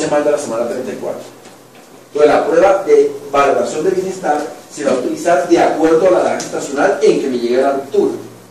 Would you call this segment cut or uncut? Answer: uncut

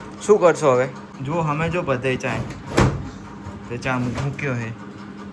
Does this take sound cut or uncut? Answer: uncut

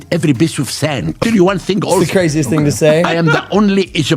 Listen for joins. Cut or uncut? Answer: cut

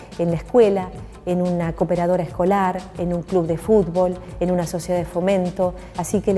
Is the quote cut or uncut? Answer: uncut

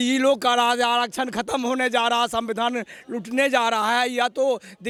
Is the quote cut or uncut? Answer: uncut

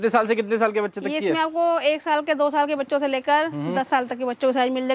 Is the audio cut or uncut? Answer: uncut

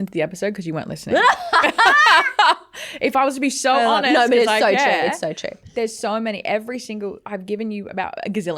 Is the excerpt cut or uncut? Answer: uncut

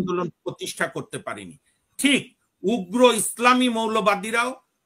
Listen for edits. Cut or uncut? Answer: uncut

